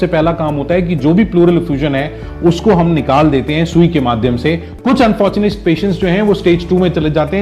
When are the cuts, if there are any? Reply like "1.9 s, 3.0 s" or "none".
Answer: 4.7 s